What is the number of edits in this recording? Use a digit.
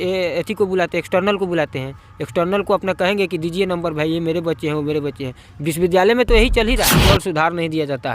1